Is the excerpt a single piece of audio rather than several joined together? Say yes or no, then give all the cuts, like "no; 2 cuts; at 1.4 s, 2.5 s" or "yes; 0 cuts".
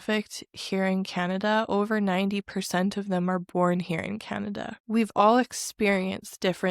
no; 1 cut; at 4.7 s